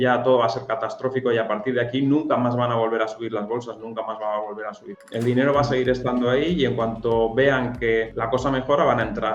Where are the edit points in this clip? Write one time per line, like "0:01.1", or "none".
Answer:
0:08.2